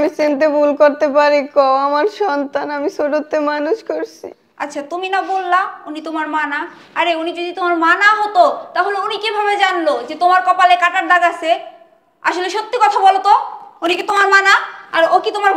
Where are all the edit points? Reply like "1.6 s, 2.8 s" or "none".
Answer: none